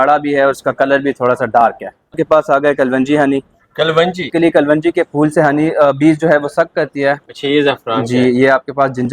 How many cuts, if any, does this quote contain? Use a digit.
3